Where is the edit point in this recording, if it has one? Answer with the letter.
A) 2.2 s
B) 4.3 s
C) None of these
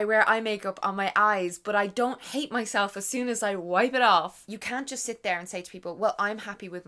B